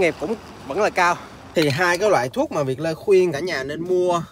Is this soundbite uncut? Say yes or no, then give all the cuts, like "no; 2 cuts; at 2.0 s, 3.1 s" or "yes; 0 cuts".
no; 1 cut; at 1.3 s